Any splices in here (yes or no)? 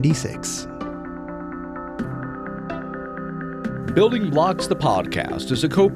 no